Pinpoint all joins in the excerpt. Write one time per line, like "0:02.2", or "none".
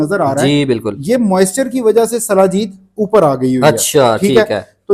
none

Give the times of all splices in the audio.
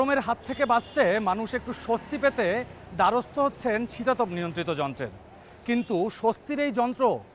none

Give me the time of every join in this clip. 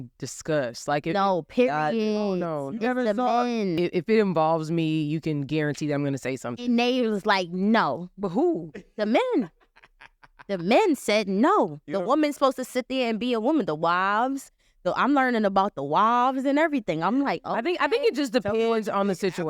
0:03.7

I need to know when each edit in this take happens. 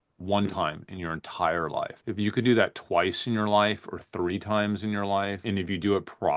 0:02.0
0:05.4

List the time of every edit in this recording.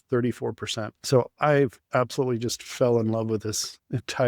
0:01.0

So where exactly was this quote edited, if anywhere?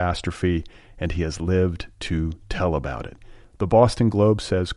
none

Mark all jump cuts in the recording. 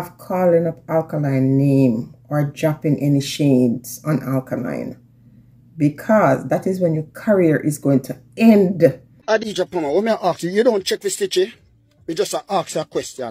0:09.1

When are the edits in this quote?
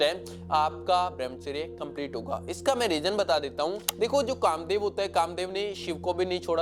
0:03.8

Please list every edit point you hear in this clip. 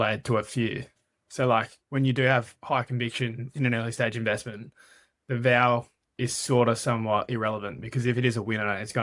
none

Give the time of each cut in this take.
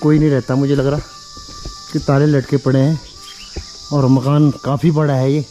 none

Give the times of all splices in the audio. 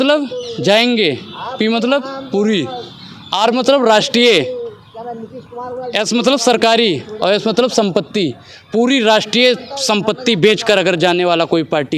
none

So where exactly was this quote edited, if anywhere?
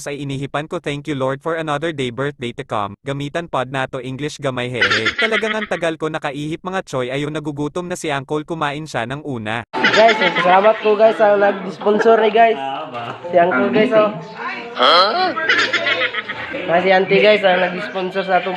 0:16.5

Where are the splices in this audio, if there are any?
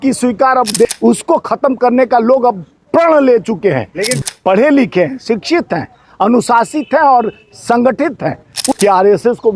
0:00.8
0:04.2
0:08.6

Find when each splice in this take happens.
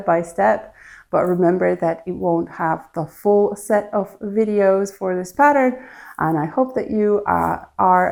none

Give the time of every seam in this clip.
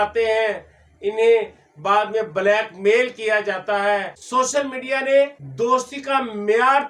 0:04.1
0:05.4

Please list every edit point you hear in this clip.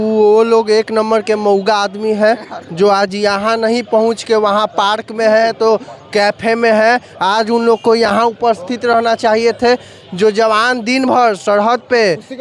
none

